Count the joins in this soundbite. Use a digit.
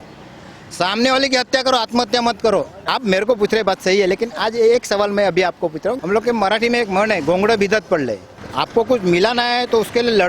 3